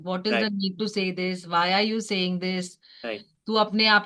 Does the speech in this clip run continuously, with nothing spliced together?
yes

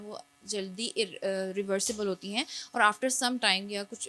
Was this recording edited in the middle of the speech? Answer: no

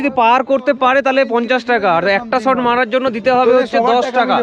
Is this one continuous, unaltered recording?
yes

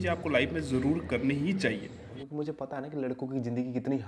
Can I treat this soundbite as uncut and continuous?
no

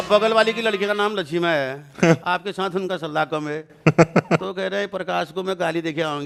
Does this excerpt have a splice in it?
no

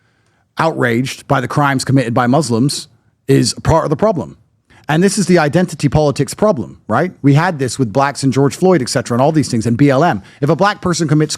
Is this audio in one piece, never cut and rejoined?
no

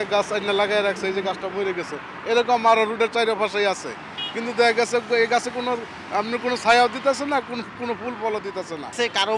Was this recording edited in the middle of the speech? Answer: no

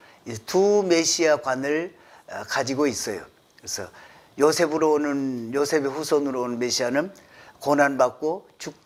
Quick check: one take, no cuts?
yes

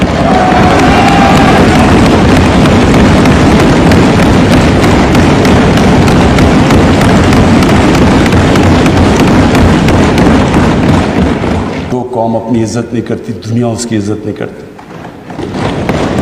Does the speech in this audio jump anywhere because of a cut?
yes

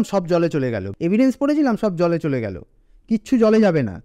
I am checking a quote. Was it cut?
yes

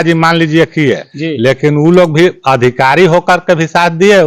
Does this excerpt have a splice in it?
no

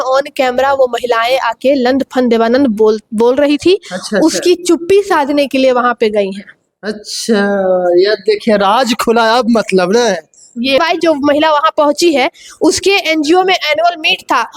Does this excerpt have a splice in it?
yes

